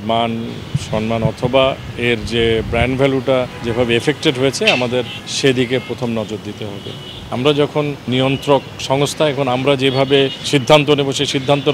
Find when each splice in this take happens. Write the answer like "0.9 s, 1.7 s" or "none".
3.6 s, 5.2 s, 7.3 s, 8.1 s, 10.5 s